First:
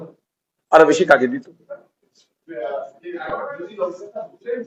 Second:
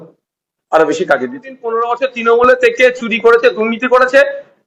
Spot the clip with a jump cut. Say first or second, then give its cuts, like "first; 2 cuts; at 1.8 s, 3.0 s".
second; 1 cut; at 1.7 s